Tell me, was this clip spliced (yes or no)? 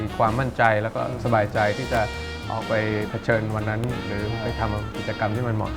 no